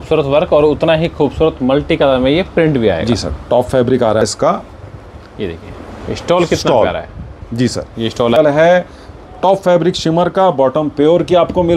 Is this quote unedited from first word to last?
no; 2 cuts; at 4.2 s, 8.4 s

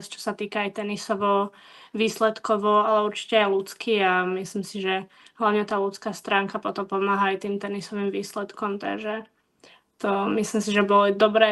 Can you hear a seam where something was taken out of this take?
no; 0 cuts

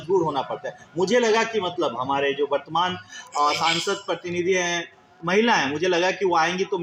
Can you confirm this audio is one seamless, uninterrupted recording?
yes; 0 cuts

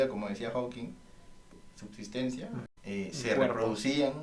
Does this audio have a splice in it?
yes; 2 cuts; at 1.5 s, 2.7 s

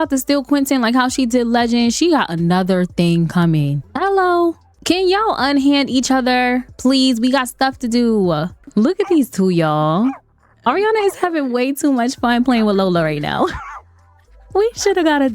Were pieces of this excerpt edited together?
yes; 3 cuts; at 3.8 s, 4.7 s, 8.6 s

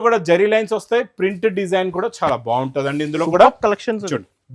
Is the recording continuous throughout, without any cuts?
yes; 0 cuts

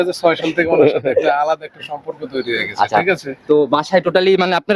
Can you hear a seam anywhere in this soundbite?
no; 0 cuts

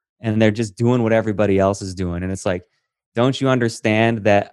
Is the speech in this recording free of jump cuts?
yes; 0 cuts

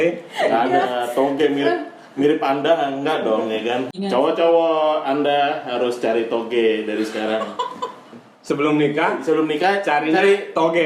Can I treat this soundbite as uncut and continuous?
no; 1 cut; at 4.0 s

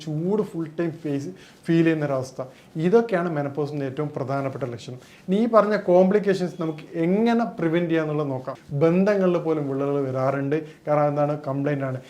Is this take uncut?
no; 1 cut; at 8.6 s

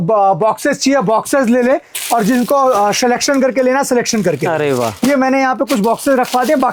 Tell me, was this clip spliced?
no; 0 cuts

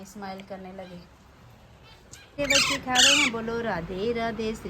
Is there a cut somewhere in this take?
yes; 1 cut; at 2.3 s

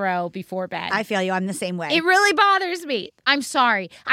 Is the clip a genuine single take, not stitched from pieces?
no; 1 cut; at 3.0 s

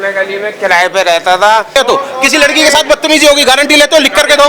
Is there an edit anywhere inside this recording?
yes; 1 cut; at 1.7 s

